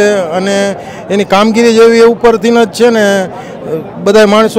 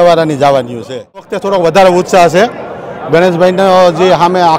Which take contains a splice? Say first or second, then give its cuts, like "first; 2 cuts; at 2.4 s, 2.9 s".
second; 1 cut; at 1.4 s